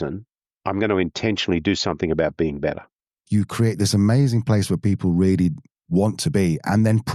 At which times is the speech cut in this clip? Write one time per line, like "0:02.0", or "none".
0:03.2